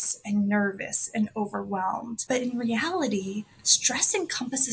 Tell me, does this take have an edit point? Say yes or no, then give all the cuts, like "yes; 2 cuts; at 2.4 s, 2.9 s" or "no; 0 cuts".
no; 0 cuts